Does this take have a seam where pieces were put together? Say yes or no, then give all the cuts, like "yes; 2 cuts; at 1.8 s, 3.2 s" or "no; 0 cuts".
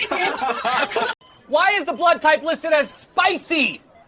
yes; 1 cut; at 1.2 s